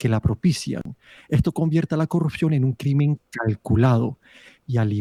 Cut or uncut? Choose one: uncut